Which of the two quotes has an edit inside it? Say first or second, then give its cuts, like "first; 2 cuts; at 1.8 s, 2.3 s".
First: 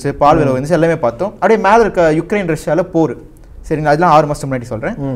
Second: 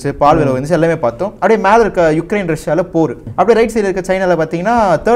second; 1 cut; at 3.2 s